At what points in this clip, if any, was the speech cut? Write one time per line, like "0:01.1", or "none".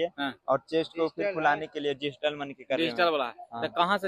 none